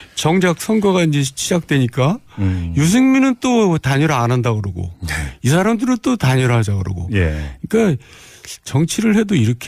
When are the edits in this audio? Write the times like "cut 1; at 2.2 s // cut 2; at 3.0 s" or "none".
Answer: cut 1; at 3.0 s